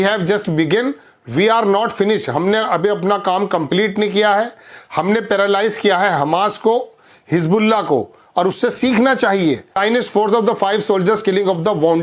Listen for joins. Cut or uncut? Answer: cut